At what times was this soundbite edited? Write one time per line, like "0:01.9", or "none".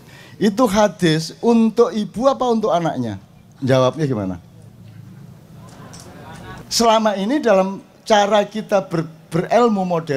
0:06.6

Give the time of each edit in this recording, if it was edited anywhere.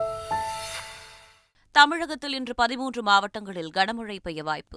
0:01.2

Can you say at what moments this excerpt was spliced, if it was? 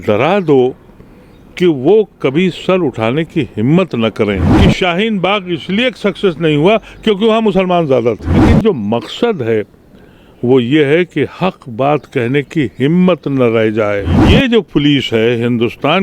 0:04.5
0:08.4
0:14.2

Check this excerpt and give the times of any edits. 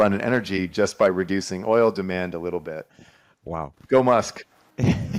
none

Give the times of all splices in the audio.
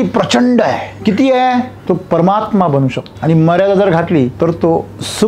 0:00.9
0:01.8
0:03.1
0:04.3

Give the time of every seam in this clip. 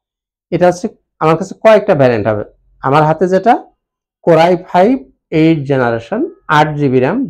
none

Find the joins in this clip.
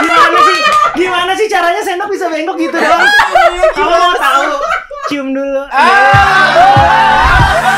none

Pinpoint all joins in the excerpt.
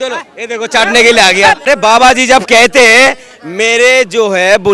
0:01.6

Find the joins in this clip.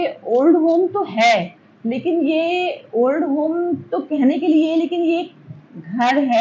none

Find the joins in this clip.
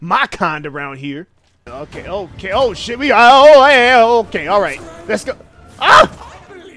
0:01.7

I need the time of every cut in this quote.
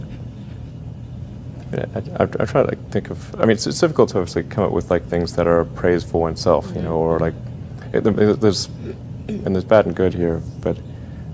0:02.5

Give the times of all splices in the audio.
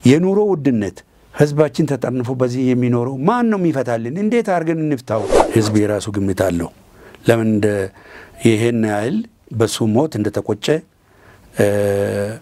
0:05.4

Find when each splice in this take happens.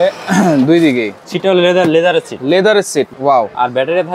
0:01.2
0:03.1

